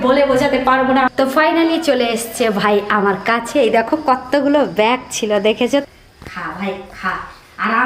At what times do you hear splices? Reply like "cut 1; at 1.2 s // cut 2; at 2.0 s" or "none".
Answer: cut 1; at 1.1 s // cut 2; at 5.8 s